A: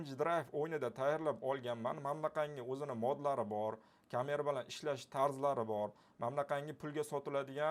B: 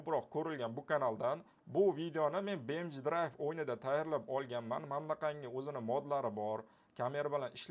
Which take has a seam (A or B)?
B